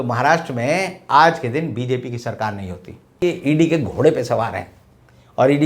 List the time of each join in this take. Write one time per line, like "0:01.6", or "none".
0:03.2